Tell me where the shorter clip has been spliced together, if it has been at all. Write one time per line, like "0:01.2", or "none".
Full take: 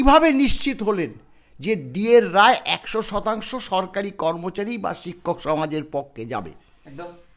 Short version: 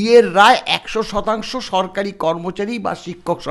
none